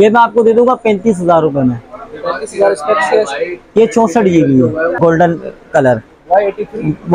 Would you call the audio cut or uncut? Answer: cut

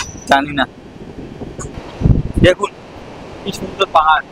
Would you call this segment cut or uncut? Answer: uncut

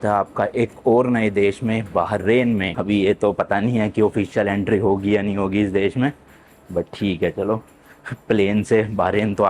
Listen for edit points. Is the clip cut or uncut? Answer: uncut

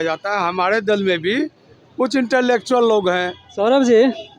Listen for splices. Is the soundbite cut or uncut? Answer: cut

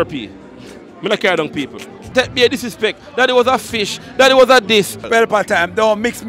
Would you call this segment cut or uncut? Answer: cut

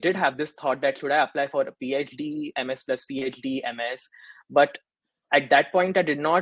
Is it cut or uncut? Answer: uncut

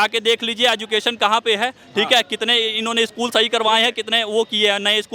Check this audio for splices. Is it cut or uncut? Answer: uncut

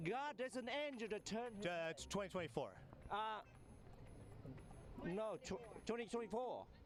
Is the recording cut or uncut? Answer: uncut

